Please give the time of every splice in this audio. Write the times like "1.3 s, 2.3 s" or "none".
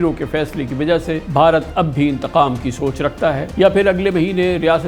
1.2 s, 3.4 s